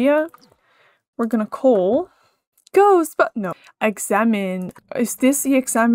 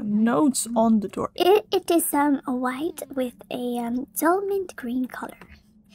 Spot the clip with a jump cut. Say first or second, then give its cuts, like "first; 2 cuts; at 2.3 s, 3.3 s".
first; 2 cuts; at 3.6 s, 4.7 s